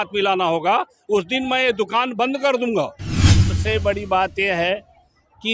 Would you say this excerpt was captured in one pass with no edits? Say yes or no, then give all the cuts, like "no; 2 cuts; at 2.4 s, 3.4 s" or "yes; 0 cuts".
no; 1 cut; at 3.5 s